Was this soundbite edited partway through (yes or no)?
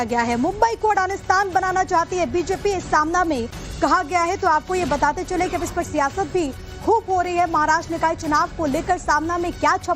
yes